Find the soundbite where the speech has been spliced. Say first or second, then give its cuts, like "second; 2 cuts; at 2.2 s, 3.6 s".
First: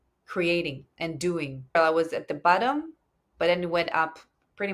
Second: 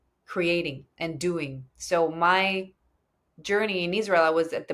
first; 1 cut; at 1.8 s